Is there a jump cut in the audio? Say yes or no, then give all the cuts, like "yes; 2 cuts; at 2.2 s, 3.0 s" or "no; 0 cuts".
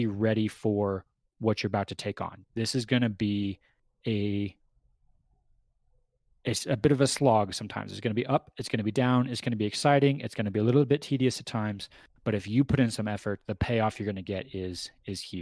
yes; 1 cut; at 2.4 s